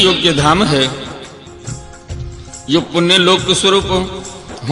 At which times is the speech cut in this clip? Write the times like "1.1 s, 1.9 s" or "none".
1.0 s, 2.6 s